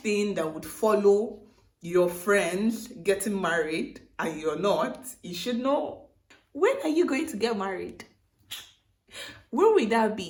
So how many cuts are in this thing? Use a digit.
0